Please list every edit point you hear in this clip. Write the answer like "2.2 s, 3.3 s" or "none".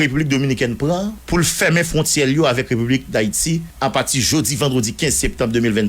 1.2 s, 3.7 s